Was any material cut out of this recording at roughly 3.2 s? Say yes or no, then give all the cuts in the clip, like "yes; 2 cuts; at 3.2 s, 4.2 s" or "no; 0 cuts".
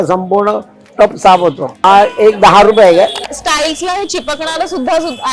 yes; 2 cuts; at 1.8 s, 3.2 s